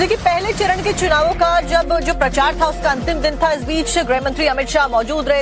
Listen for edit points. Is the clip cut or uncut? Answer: cut